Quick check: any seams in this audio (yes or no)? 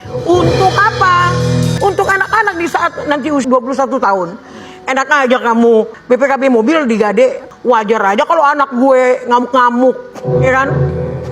yes